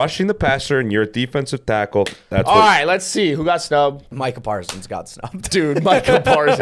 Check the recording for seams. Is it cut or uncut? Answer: cut